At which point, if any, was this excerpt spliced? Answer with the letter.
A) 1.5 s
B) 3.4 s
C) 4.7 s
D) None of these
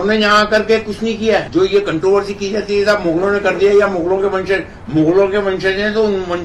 A